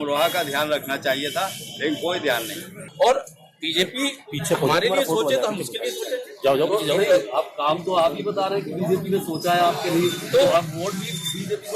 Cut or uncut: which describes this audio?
cut